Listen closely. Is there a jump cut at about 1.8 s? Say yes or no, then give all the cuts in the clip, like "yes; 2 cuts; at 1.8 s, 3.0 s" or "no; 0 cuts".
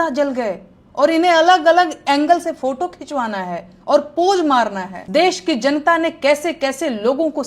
no; 1 cut; at 4.9 s